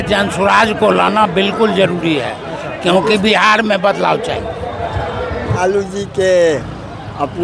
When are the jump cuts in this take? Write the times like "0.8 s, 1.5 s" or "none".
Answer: 5.6 s